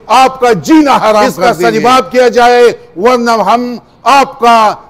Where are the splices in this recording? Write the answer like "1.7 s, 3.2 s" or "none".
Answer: 1.3 s